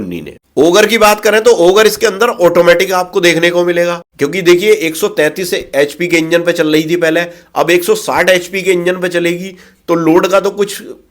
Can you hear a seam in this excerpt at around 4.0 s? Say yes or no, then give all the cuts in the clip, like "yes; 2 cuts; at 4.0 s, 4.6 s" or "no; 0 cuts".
yes; 1 cut; at 4.0 s